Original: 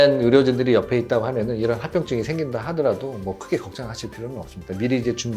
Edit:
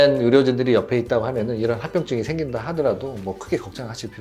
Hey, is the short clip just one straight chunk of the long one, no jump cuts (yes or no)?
yes